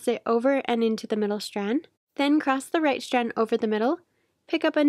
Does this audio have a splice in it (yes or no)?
yes